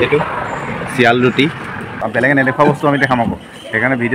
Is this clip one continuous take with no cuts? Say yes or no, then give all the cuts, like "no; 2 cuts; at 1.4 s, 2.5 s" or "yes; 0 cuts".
no; 1 cut; at 2.0 s